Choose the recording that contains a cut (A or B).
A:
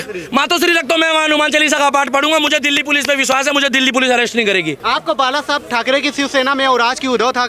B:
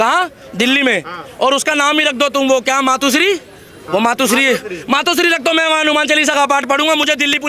A